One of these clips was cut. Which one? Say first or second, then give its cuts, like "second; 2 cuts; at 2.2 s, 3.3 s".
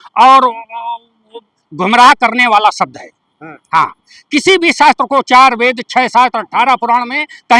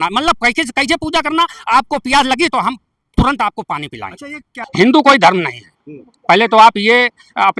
second; 1 cut; at 4.5 s